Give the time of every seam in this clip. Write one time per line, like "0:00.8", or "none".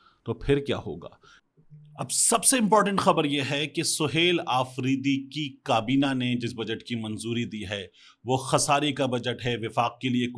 0:01.3